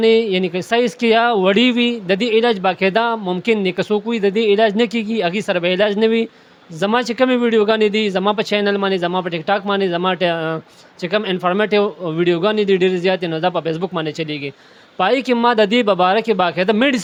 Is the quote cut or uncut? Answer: uncut